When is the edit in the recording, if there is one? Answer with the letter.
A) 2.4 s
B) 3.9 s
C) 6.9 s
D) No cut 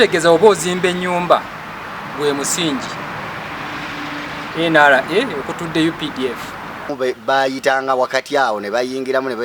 C